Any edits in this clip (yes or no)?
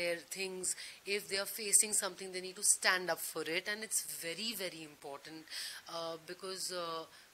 no